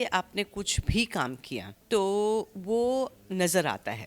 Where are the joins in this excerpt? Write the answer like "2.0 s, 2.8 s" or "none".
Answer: 1.7 s